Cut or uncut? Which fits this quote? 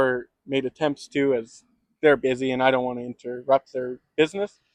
uncut